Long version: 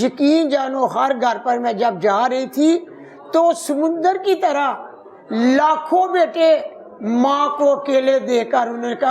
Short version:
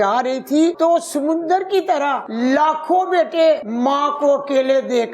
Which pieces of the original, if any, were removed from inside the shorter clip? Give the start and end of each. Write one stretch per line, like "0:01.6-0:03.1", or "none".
0:02.8-0:03.3
0:04.8-0:05.3
0:06.7-0:07.1